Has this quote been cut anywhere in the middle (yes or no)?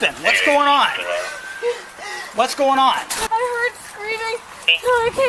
yes